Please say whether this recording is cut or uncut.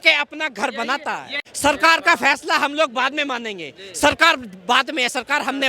cut